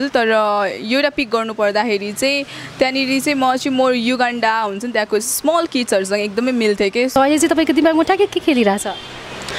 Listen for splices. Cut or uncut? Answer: cut